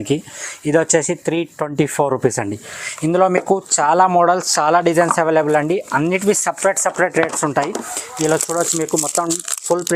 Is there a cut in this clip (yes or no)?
no